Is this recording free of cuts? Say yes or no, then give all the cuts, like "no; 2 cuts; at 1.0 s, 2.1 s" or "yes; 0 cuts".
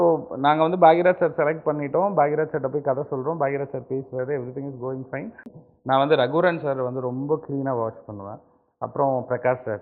no; 1 cut; at 5.6 s